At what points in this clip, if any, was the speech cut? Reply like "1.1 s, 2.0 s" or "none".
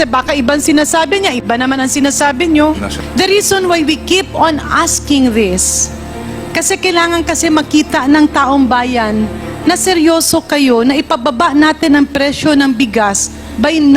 3.0 s